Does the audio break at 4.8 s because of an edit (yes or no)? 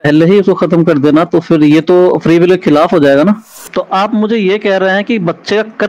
no